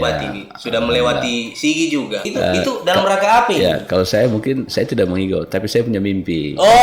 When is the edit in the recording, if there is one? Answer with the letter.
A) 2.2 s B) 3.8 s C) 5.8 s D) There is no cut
A